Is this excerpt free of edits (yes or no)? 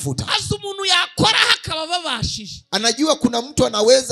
yes